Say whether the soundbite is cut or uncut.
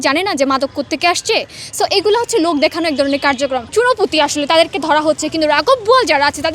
cut